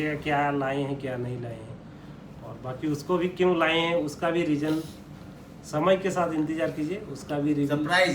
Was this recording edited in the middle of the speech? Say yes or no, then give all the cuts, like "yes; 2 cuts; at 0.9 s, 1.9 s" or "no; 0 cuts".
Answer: no; 0 cuts